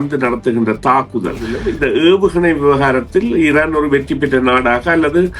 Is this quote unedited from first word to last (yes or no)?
no